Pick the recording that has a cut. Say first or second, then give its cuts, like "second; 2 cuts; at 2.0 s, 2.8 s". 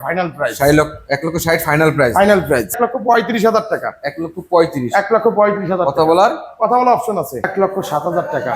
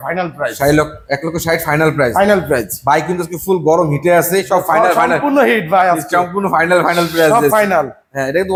first; 2 cuts; at 2.8 s, 7.5 s